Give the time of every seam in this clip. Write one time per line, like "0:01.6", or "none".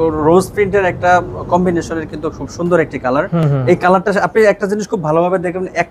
none